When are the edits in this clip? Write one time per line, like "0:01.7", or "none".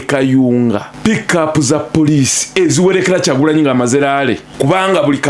0:00.9
0:04.5